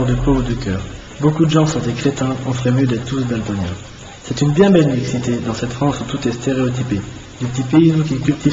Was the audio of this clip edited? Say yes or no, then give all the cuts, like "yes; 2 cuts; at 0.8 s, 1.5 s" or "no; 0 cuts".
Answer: yes; 1 cut; at 7.4 s